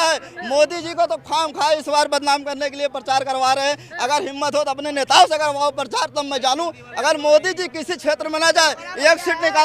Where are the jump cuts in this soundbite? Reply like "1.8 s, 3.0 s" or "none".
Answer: none